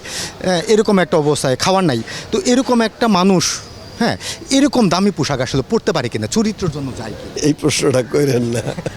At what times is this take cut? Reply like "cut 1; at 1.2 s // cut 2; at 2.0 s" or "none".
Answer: cut 1; at 7.4 s